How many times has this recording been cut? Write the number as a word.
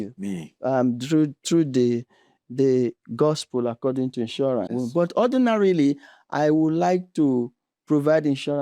one